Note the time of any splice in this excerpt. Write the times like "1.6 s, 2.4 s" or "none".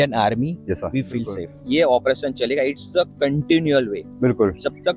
1.5 s